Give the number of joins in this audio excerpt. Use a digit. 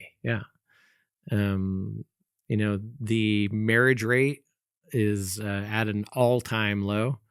0